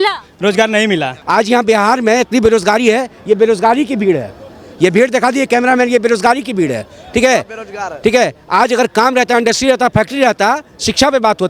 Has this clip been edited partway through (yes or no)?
yes